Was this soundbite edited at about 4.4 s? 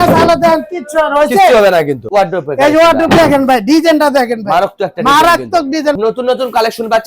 no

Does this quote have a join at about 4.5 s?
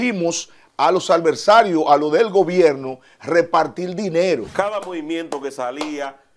yes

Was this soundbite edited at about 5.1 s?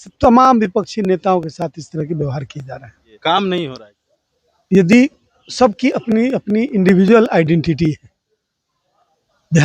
no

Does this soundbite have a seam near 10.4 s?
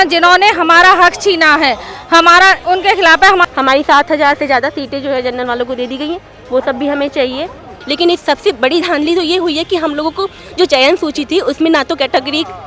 no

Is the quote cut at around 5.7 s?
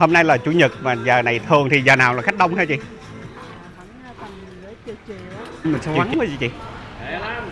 yes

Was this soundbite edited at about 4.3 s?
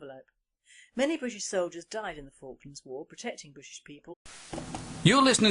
no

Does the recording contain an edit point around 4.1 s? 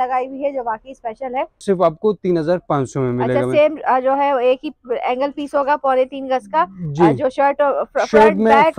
no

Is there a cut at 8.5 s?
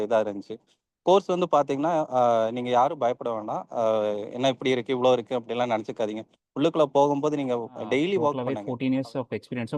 yes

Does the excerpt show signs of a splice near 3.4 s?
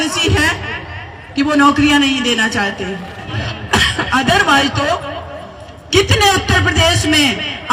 yes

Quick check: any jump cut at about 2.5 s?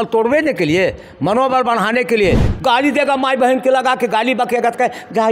yes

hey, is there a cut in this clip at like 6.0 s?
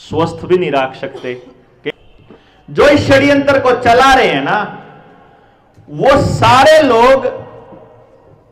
no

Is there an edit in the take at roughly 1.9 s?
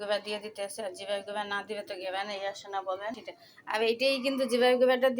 no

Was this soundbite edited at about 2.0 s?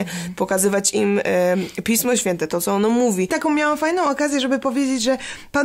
no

